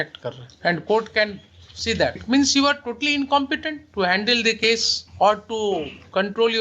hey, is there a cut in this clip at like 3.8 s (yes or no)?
yes